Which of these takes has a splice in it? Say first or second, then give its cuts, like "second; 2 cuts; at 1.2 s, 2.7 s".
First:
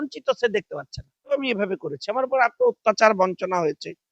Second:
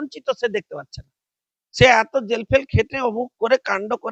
first; 1 cut; at 1.4 s